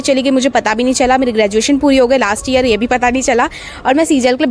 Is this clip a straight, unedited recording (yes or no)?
yes